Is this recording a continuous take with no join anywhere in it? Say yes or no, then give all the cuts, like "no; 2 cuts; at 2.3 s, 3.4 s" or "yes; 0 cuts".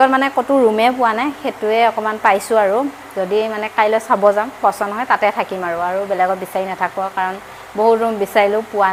yes; 0 cuts